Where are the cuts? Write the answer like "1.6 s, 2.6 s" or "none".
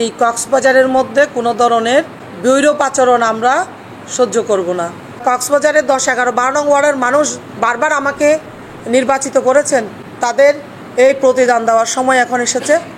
2.2 s, 5.2 s, 10.0 s